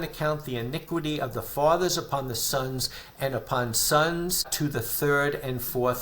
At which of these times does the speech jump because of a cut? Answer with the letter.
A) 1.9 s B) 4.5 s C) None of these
B